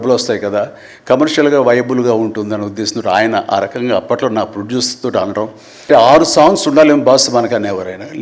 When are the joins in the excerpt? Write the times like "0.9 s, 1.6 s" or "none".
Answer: 5.9 s